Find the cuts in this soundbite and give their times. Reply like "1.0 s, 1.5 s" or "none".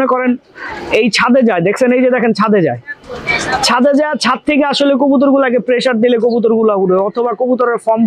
none